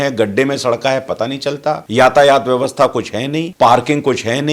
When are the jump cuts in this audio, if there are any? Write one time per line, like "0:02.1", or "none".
0:01.8
0:03.4